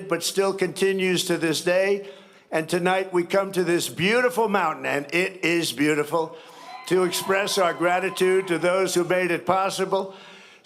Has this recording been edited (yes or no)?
no